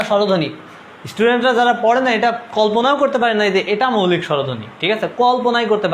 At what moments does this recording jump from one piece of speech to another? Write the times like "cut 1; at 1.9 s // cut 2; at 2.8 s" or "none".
none

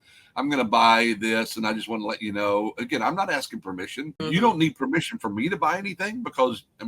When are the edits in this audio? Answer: cut 1; at 4.2 s

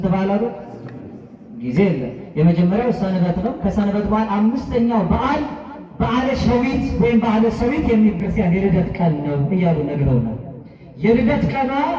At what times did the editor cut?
cut 1; at 8.2 s

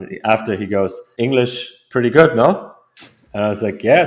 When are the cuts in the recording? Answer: cut 1; at 1.0 s

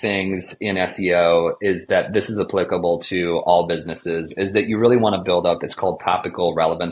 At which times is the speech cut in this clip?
none

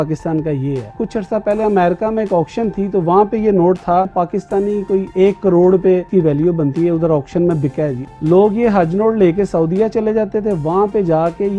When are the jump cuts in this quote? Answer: cut 1; at 0.9 s // cut 2; at 4.1 s // cut 3; at 6.1 s // cut 4; at 8.0 s

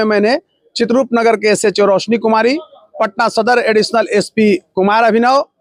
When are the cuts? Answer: none

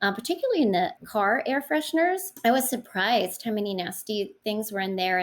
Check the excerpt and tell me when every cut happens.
cut 1; at 1.0 s // cut 2; at 2.3 s

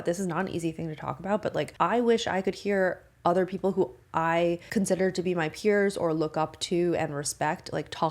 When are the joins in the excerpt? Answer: cut 1; at 1.7 s // cut 2; at 4.6 s

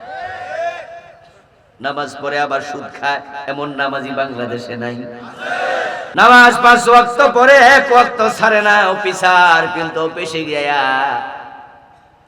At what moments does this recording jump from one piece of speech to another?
cut 1; at 6.1 s

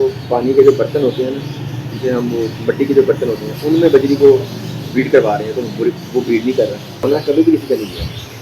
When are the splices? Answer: cut 1; at 7.1 s

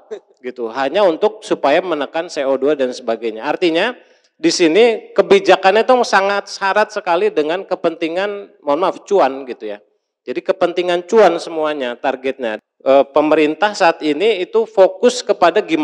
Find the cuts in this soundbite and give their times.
cut 1; at 12.5 s

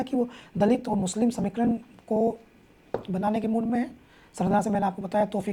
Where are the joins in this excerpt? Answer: none

